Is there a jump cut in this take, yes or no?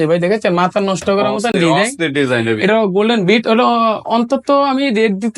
no